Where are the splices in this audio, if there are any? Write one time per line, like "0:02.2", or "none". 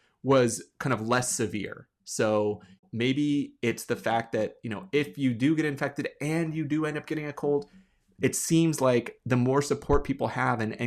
0:02.8